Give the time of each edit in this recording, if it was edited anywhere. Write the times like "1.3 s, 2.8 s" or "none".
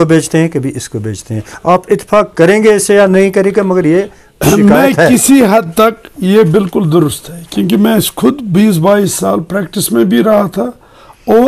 none